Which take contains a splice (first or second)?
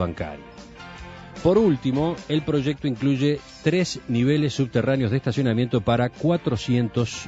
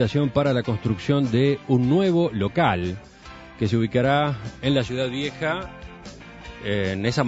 first